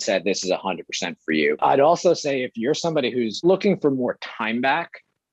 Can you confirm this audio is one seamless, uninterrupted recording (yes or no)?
no